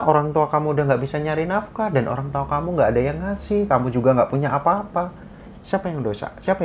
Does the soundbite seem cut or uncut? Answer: uncut